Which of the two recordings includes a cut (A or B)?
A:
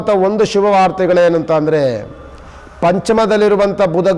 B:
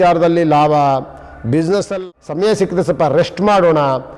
B